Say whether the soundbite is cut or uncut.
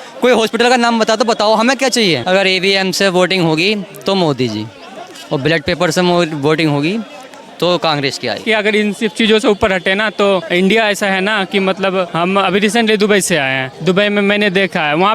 cut